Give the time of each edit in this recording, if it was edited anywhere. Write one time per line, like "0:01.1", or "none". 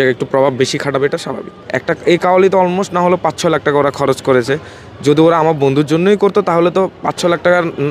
0:01.6